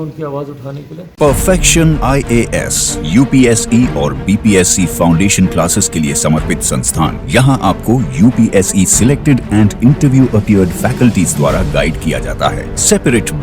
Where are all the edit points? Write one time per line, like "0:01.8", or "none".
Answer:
none

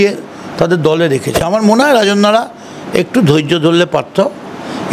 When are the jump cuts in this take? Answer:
0:01.4

